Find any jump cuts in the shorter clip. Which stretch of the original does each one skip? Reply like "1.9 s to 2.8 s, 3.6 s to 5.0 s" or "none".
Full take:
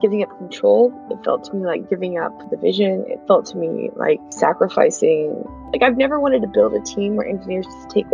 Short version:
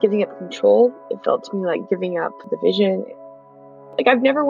3.5 s to 5.2 s